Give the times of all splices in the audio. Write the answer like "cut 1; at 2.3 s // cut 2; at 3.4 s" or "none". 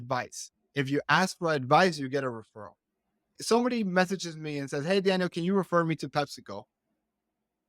cut 1; at 3.3 s